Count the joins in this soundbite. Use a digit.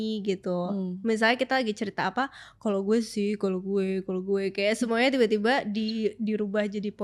0